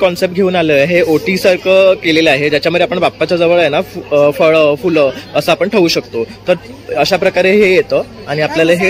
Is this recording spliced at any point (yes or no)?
no